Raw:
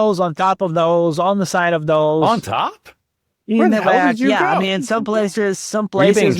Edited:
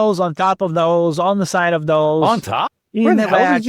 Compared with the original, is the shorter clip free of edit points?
no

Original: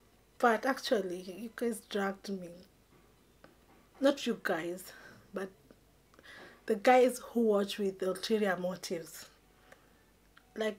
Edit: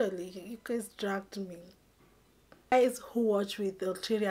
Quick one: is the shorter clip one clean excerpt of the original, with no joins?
no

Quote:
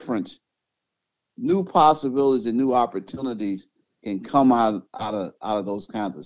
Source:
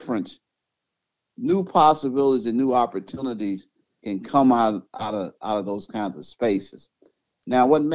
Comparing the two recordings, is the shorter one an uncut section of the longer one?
yes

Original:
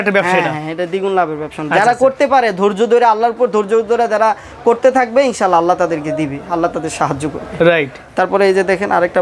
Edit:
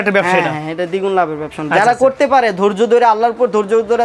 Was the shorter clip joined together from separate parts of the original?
no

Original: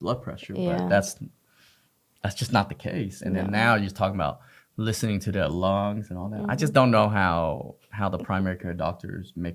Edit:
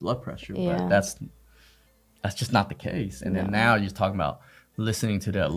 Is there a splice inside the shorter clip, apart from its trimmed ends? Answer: no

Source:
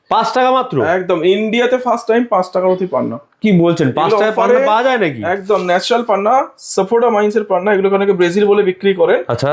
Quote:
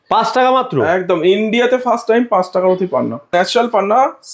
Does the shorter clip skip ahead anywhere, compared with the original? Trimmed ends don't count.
yes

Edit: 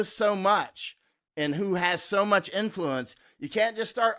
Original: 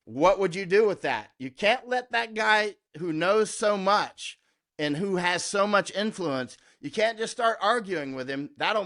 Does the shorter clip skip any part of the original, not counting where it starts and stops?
no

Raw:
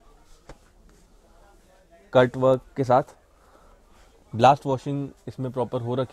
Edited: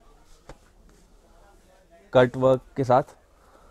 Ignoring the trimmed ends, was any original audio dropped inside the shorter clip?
no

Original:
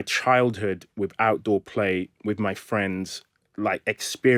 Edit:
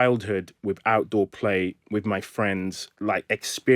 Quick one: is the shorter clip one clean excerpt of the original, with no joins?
no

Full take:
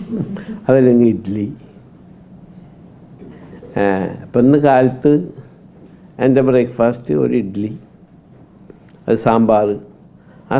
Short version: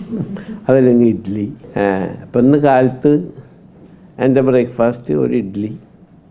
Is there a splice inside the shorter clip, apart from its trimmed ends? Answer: yes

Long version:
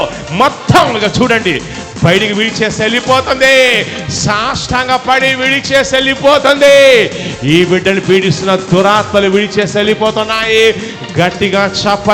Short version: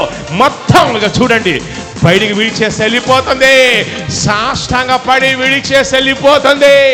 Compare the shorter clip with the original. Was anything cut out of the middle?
no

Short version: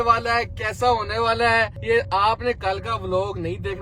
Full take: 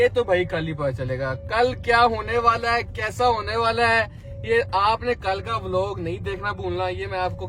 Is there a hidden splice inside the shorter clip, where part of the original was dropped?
yes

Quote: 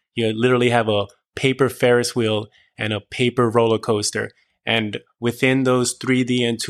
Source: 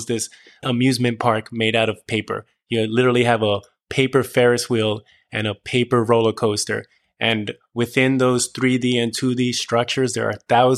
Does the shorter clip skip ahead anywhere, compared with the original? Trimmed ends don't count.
no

